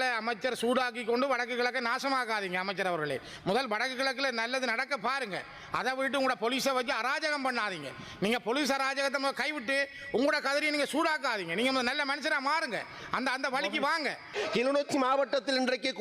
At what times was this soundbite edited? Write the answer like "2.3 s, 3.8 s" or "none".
14.4 s